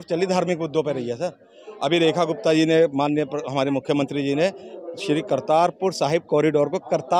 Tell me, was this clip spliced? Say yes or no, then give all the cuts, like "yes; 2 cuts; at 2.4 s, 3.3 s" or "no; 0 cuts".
no; 0 cuts